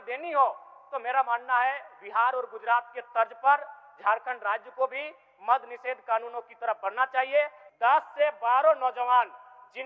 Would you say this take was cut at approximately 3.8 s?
no; 1 cut; at 7.6 s

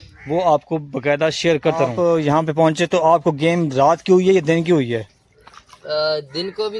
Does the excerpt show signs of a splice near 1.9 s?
yes; 1 cut; at 1.9 s

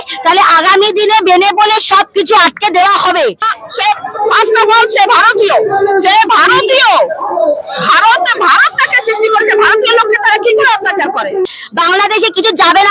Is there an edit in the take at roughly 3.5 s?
yes; 2 cuts; at 3.5 s, 11.4 s

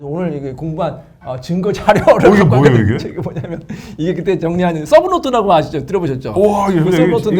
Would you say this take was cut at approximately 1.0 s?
no; 0 cuts

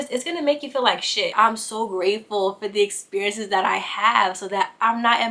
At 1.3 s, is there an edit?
yes; 1 cut; at 1.3 s

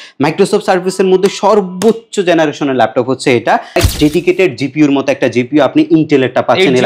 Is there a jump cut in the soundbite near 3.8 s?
yes; 1 cut; at 3.8 s

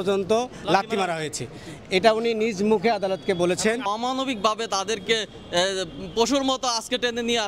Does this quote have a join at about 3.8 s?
yes; 1 cut; at 3.8 s

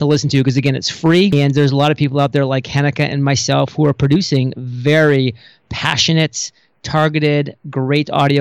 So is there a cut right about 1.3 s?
yes; 1 cut; at 1.3 s

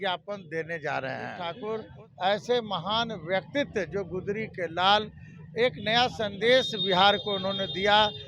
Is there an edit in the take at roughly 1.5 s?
yes; 1 cut; at 1.5 s

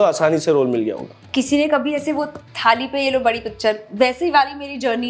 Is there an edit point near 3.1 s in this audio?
no; 1 cut; at 1.2 s

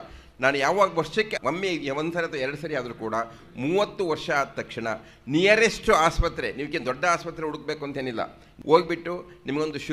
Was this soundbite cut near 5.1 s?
no; 1 cut; at 8.4 s

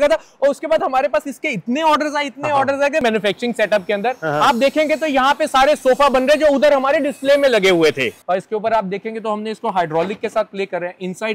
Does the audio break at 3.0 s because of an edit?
yes; 2 cuts; at 3.0 s, 8.1 s

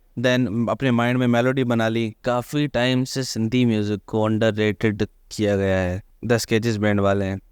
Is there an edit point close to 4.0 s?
no; 2 cuts; at 2.2 s, 6.0 s

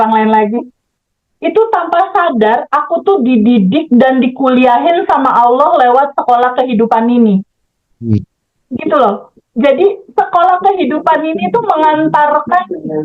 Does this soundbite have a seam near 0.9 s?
yes; 1 cut; at 0.9 s

